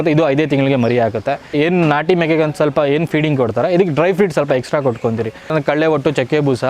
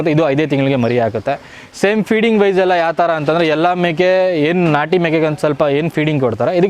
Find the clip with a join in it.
first; 2 cuts; at 1.5 s, 5.5 s

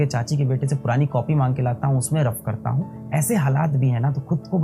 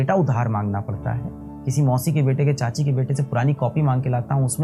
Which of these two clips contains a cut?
second; 1 cut; at 1.4 s

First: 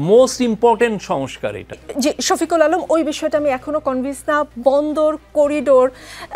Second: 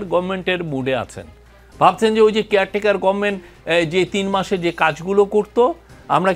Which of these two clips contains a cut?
first; 1 cut; at 1.9 s

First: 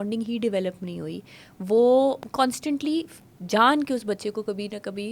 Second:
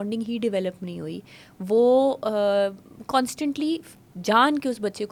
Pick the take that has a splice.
first; 1 cut; at 2.2 s

